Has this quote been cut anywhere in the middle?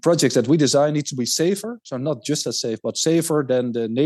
no; 0 cuts

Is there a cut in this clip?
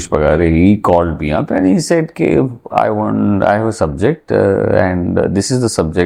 no; 0 cuts

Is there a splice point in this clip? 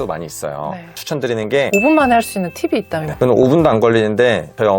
yes; 2 cuts; at 1.7 s, 3.0 s

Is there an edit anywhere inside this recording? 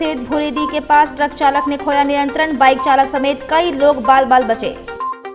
no; 0 cuts

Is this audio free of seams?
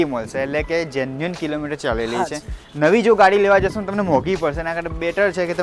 yes; 0 cuts

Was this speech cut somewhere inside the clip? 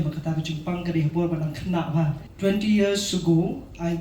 yes; 1 cut; at 2.2 s

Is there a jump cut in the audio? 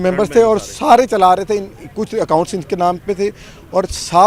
no; 0 cuts

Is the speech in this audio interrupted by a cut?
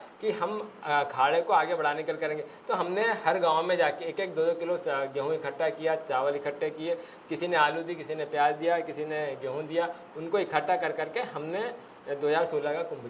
no; 0 cuts

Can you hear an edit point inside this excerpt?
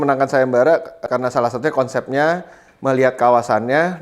yes; 1 cut; at 1.0 s

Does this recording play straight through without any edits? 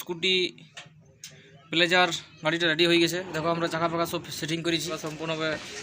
no; 1 cut; at 4.9 s

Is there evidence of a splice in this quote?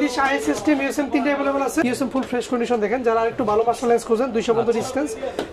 yes; 1 cut; at 1.8 s

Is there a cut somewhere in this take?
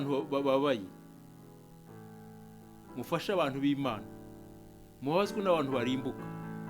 no; 0 cuts

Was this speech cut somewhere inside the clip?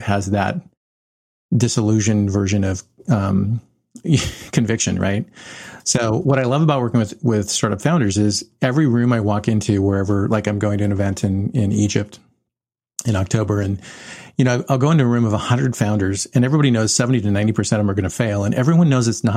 no; 0 cuts

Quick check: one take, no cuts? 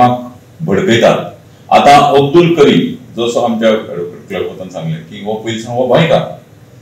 yes; 0 cuts

